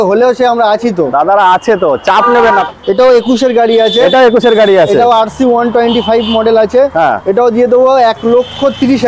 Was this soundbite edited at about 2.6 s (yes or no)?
yes